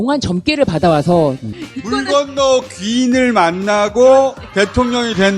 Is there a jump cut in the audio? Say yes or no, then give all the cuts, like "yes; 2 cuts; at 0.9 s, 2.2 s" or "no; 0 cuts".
yes; 1 cut; at 1.5 s